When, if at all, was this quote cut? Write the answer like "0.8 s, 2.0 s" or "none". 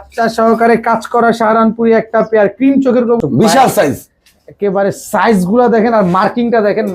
3.2 s